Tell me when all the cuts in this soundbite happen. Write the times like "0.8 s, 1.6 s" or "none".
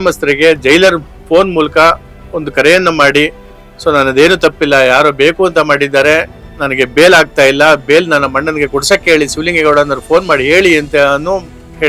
none